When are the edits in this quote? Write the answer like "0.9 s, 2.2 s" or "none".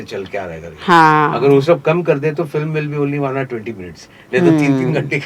none